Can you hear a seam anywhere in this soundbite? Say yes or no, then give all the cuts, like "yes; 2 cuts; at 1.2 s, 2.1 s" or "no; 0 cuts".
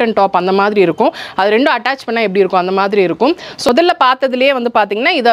yes; 1 cut; at 3.5 s